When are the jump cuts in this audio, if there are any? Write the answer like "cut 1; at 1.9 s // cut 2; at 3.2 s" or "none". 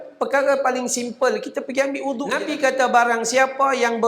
cut 1; at 2.3 s